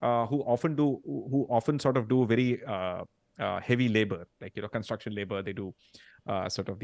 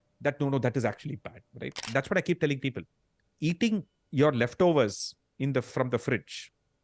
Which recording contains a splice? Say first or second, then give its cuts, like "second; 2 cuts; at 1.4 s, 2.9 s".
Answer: second; 1 cut; at 1.9 s